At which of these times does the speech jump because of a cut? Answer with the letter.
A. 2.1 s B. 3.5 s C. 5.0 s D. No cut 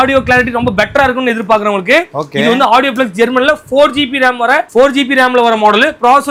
D